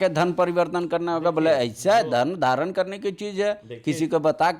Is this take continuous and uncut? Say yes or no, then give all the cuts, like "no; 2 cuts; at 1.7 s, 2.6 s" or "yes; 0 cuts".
yes; 0 cuts